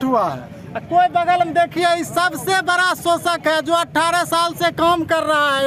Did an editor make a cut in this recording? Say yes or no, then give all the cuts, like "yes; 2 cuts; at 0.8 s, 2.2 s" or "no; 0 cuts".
no; 0 cuts